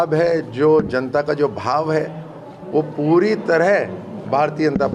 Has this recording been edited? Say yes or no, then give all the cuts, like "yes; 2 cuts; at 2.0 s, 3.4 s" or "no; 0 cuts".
no; 0 cuts